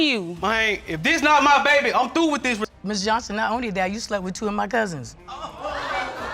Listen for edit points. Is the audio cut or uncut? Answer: cut